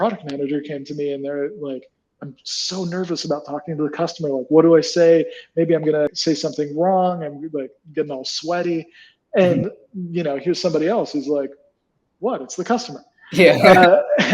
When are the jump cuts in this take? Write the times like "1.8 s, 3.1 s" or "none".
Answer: 6.1 s